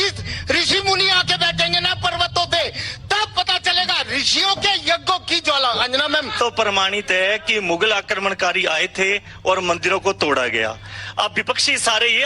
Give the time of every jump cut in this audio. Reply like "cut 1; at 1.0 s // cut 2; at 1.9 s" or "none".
cut 1; at 6.3 s